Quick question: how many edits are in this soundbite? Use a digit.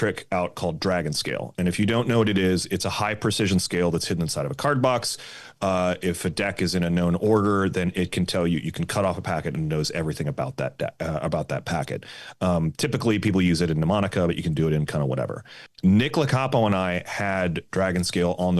1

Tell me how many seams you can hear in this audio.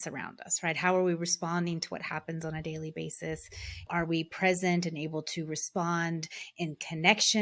1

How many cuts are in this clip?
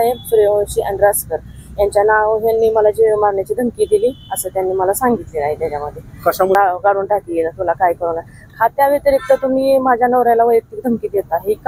1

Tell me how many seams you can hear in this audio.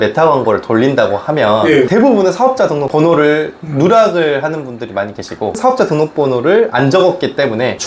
1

